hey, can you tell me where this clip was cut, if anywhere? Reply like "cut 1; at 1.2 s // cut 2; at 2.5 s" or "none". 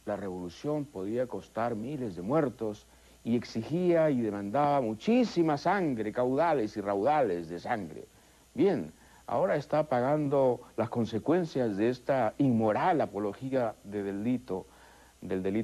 cut 1; at 3.1 s